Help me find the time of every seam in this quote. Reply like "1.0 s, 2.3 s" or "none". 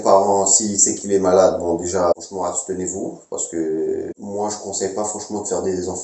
none

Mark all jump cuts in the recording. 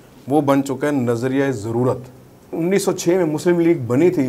2.5 s

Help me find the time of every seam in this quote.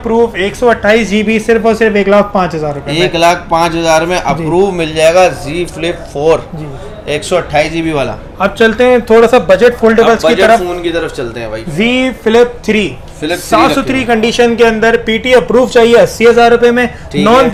none

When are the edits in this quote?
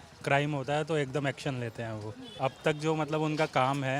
2.2 s

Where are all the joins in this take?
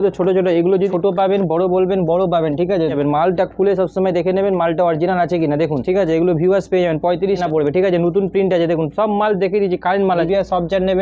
0.9 s, 2.9 s, 5.8 s, 7.4 s, 10.2 s

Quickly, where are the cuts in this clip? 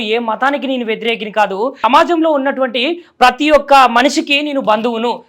1.8 s

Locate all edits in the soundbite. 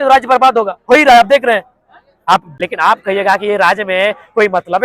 2.5 s

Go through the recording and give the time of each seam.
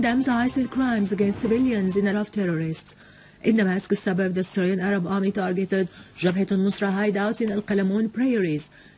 none

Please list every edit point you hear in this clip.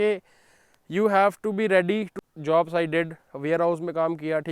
2.1 s

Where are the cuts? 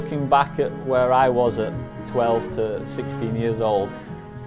none

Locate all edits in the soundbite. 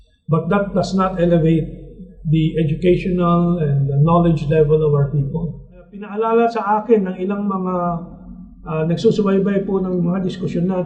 6.0 s

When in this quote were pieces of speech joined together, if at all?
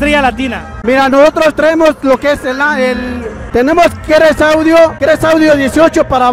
3.4 s

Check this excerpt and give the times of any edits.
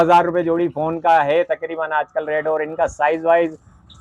none

